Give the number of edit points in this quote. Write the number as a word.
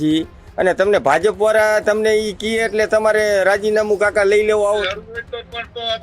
one